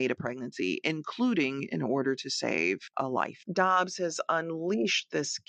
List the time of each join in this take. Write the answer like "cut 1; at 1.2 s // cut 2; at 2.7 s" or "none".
cut 1; at 3.4 s